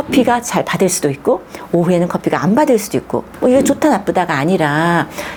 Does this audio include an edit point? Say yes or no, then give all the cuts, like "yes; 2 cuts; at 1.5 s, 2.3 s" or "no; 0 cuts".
no; 0 cuts